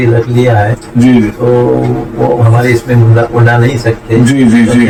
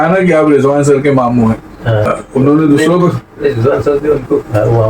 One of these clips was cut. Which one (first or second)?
second